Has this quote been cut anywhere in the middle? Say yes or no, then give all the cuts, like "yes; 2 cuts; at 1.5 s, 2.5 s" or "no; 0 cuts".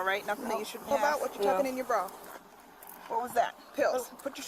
yes; 1 cut; at 0.9 s